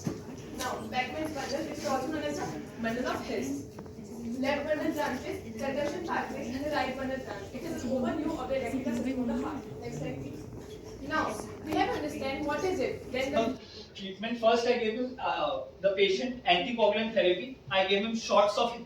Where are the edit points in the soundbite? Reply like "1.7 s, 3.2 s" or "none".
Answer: 13.4 s